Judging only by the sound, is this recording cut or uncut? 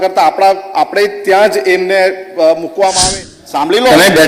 cut